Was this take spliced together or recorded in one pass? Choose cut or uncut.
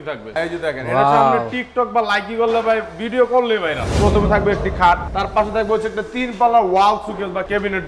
cut